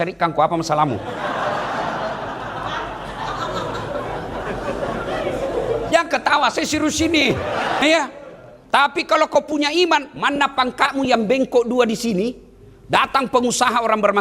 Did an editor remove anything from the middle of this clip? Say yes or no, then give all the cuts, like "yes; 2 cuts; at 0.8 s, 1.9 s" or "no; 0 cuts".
yes; 1 cut; at 7.8 s